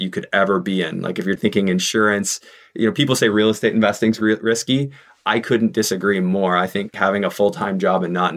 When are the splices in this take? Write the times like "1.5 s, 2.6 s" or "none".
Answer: 1.4 s, 6.9 s